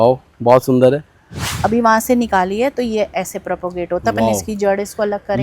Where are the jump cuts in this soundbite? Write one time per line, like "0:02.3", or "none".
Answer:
0:01.4

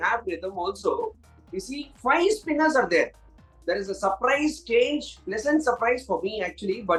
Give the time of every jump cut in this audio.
none

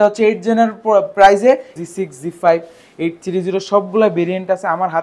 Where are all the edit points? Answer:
0:01.8

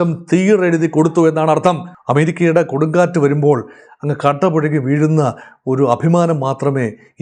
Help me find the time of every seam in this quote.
0:01.9

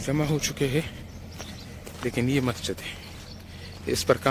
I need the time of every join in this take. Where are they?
none

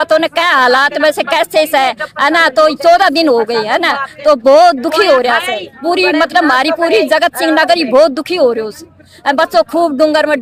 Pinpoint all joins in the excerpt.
none

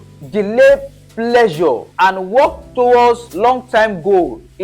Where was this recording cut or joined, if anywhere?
0:01.9
0:03.3

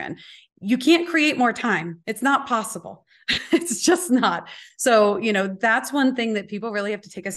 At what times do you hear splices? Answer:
0:02.0

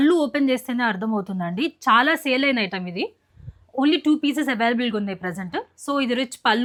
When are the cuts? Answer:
none

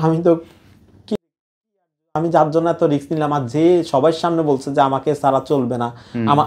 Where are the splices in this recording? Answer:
none

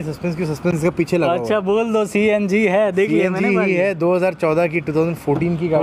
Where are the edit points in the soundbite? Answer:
none

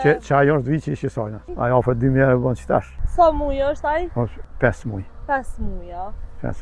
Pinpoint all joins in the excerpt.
0:01.4
0:03.0
0:04.4

